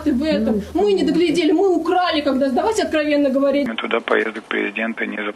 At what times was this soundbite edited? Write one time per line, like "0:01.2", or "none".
0:03.7